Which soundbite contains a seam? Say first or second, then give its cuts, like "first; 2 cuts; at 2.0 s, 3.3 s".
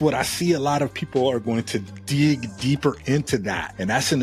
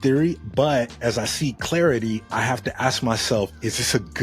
second; 1 cut; at 0.9 s